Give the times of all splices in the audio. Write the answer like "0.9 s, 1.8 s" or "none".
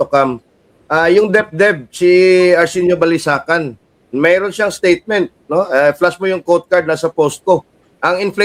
none